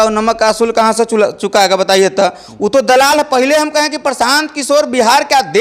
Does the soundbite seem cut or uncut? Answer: uncut